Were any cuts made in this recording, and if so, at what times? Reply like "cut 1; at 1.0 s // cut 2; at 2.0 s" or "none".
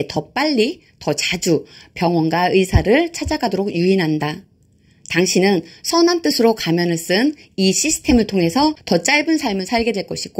cut 1; at 8.8 s

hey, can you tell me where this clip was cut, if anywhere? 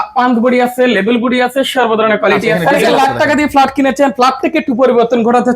cut 1; at 2.5 s

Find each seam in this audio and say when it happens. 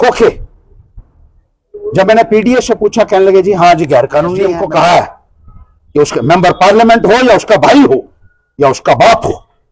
cut 1; at 4.6 s

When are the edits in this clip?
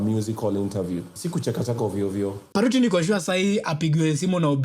cut 1; at 1.2 s // cut 2; at 2.4 s

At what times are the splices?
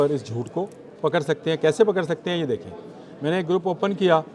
none

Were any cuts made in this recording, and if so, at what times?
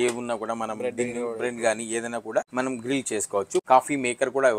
cut 1; at 2.5 s // cut 2; at 3.6 s

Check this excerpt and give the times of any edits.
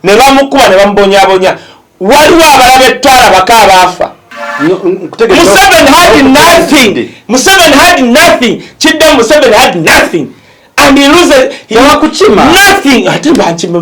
cut 1; at 4.4 s

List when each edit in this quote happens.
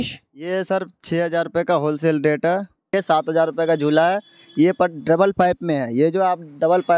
cut 1; at 2.9 s

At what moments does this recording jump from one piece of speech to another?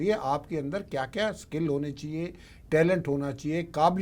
none

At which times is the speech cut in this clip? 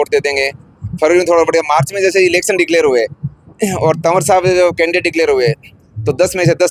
none

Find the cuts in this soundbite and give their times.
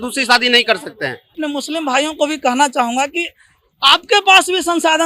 cut 1; at 1.4 s

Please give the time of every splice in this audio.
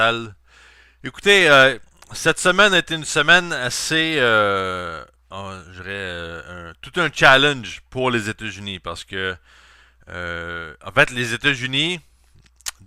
none

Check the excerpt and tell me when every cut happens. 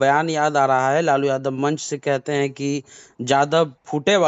none

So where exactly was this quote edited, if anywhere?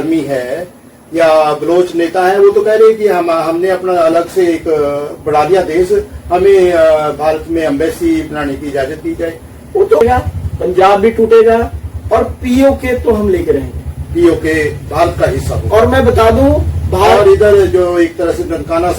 cut 1; at 10.0 s

